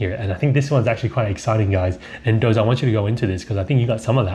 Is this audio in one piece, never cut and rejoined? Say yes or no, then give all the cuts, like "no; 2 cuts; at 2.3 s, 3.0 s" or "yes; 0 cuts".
yes; 0 cuts